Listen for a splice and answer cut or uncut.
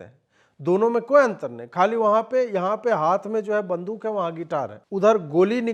cut